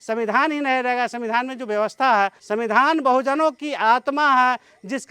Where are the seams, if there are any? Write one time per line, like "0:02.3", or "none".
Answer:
0:02.4